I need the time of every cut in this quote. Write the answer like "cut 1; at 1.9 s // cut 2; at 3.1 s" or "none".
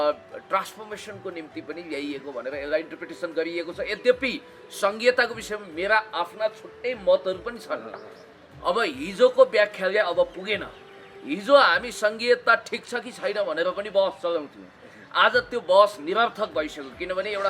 none